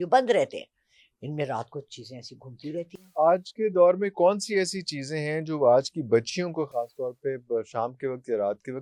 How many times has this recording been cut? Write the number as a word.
zero